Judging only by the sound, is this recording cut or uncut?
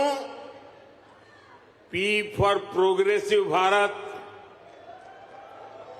cut